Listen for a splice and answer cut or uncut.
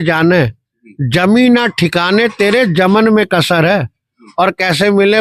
uncut